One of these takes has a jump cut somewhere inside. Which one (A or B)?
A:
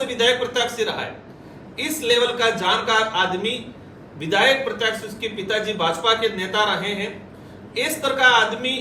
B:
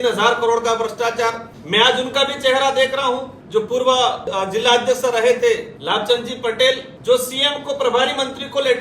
B